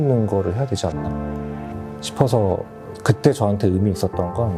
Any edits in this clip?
no; 0 cuts

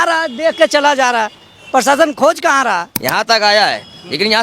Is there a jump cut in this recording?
yes; 1 cut; at 2.9 s

